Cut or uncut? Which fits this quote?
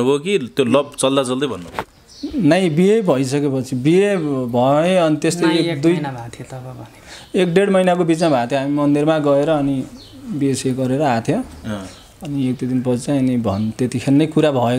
uncut